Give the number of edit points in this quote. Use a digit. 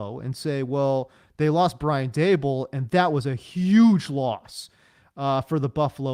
0